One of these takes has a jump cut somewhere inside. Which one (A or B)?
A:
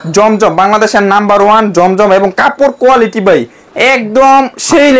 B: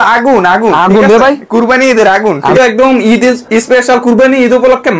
B